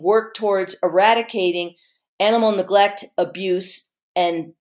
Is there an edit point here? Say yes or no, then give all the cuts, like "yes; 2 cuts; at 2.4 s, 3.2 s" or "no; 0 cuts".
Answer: no; 0 cuts